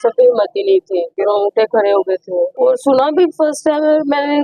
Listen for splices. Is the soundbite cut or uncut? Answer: cut